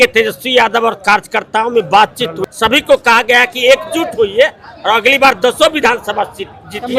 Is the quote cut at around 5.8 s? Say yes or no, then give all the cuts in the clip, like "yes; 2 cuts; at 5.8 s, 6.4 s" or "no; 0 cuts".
no; 1 cut; at 2.4 s